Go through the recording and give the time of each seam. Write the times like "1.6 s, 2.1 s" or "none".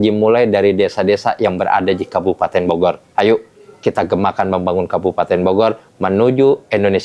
none